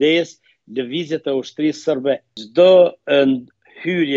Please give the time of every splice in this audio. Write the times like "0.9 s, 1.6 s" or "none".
2.3 s